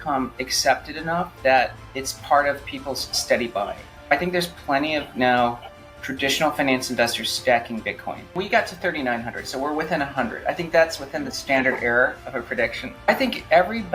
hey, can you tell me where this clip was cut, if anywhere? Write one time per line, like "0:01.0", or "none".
0:08.2
0:13.0